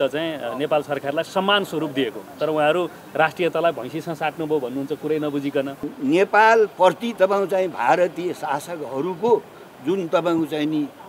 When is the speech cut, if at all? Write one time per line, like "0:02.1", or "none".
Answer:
0:05.8